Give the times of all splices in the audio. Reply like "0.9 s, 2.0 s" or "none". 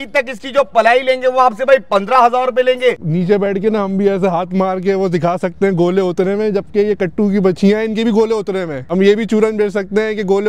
3.0 s, 8.8 s